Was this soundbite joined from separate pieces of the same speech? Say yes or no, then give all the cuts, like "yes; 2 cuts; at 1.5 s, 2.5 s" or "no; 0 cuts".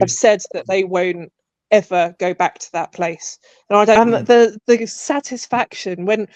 yes; 1 cut; at 4.0 s